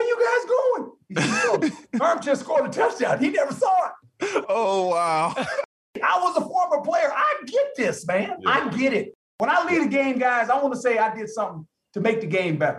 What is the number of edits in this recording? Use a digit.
2